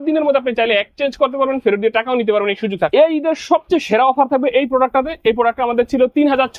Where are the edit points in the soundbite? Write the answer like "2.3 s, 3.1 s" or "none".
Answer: 2.9 s